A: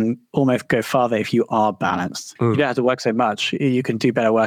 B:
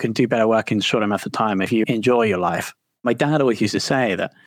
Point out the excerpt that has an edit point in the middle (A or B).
B